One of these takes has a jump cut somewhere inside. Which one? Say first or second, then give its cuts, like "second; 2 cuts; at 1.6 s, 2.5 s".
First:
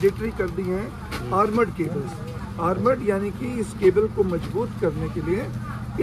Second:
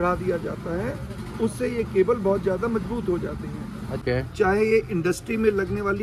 second; 1 cut; at 4.0 s